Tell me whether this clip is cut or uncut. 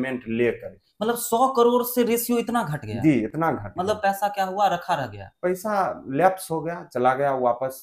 uncut